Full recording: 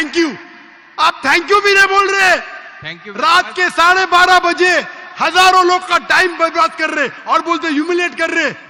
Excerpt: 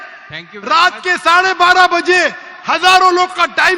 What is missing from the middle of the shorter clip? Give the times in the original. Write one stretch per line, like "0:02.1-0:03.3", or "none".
none